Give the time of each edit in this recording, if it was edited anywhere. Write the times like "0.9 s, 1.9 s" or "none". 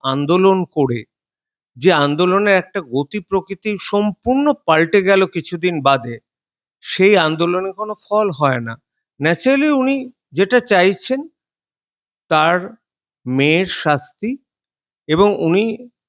none